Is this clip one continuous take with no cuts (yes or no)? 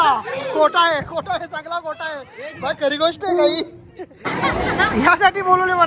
no